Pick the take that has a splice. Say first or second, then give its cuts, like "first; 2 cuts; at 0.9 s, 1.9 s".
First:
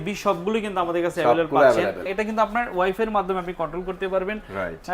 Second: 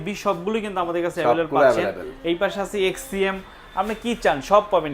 first; 1 cut; at 2.1 s